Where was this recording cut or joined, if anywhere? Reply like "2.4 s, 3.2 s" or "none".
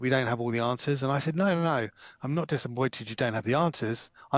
none